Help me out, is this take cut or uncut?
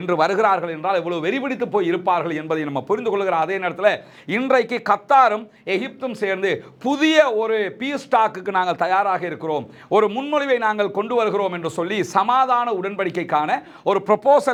uncut